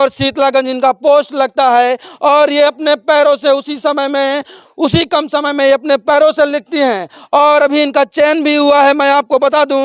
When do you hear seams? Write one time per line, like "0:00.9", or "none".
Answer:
none